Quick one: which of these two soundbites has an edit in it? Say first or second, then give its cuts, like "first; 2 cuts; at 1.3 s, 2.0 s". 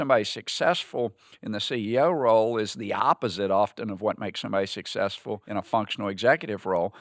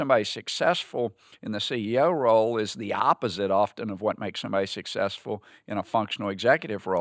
first; 1 cut; at 5.4 s